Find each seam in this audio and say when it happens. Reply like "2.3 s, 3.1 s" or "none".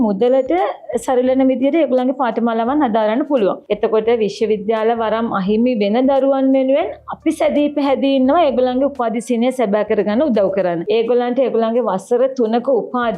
3.6 s, 10.8 s